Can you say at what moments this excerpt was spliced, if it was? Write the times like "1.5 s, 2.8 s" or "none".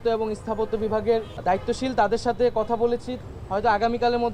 1.3 s, 3.1 s